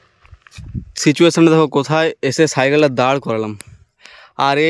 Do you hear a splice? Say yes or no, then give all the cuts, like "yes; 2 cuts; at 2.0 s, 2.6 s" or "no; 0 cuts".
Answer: yes; 1 cut; at 1.0 s